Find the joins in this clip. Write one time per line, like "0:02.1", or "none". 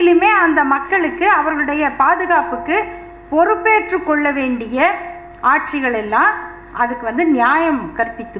none